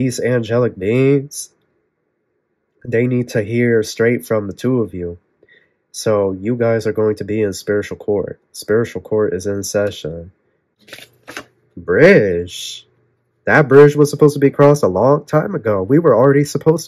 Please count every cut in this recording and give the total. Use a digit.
1